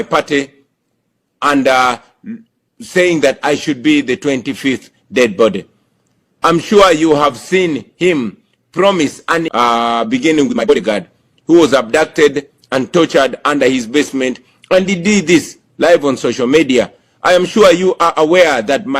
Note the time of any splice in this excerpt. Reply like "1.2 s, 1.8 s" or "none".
9.5 s, 10.7 s